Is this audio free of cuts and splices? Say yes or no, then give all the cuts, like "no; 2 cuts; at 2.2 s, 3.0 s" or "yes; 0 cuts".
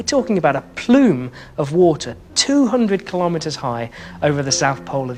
yes; 0 cuts